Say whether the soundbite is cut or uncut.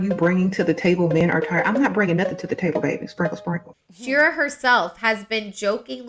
cut